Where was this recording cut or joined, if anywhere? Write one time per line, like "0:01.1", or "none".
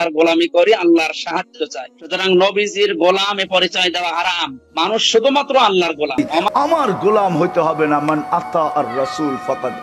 0:06.1